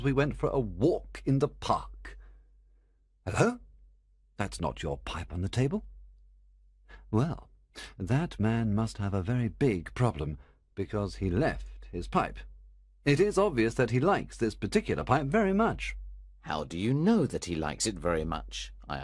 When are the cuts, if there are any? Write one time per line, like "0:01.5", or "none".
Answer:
0:14.2

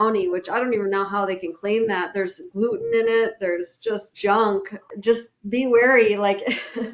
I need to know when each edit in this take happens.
0:04.1
0:04.8

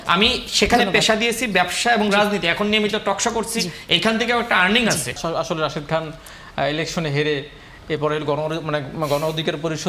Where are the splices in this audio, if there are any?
0:05.2

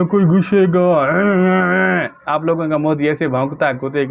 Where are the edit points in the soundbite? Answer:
none

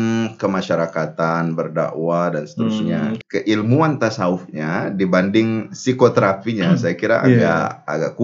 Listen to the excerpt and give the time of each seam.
0:03.1

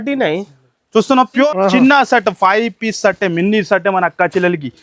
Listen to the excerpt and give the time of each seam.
0:01.5

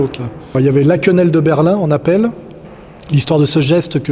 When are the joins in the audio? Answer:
none

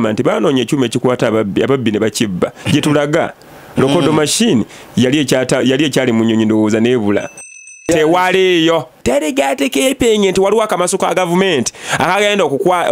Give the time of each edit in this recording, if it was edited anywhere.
0:07.6
0:09.0

